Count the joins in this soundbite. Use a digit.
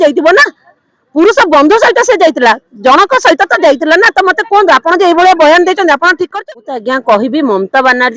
1